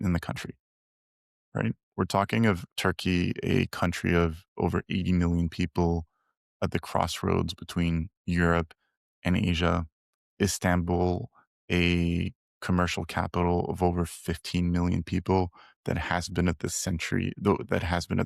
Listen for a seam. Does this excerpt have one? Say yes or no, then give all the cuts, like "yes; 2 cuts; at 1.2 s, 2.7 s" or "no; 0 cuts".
yes; 1 cut; at 2.7 s